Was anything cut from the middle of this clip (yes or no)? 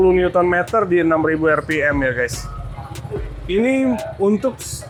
no